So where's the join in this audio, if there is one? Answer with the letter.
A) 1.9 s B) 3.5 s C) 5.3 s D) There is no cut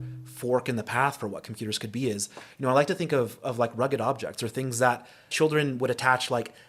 C